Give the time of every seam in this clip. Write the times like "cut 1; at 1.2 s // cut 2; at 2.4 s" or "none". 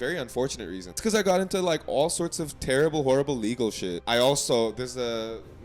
cut 1; at 1.0 s // cut 2; at 3.9 s